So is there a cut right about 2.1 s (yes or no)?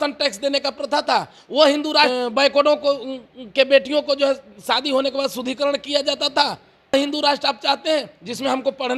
yes